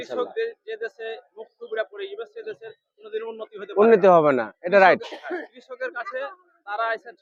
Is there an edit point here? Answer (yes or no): no